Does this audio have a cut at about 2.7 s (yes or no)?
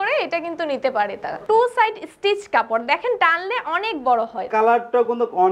no